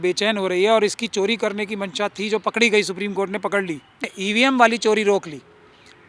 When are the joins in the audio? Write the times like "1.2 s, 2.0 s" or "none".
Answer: 4.1 s